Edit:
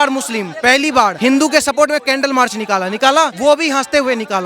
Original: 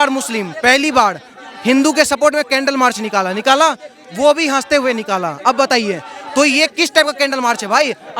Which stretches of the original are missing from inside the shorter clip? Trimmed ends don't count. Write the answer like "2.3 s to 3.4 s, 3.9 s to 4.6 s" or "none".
1.1 s to 1.6 s, 3.8 s to 4.1 s